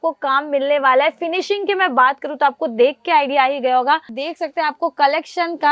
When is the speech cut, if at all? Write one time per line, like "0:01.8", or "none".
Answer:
0:04.2